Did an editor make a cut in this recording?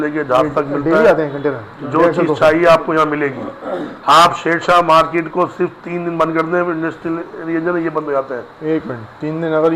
no; 0 cuts

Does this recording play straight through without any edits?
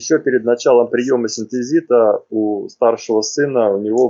yes; 0 cuts

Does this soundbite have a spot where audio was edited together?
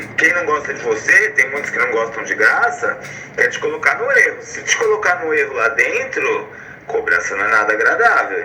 no; 0 cuts

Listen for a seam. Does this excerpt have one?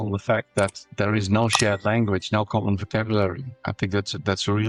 no; 0 cuts

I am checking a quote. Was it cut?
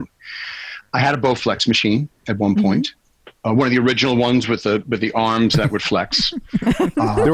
no; 0 cuts

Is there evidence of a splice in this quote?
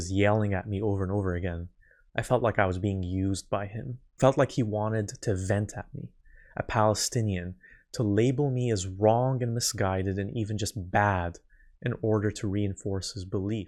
no; 0 cuts

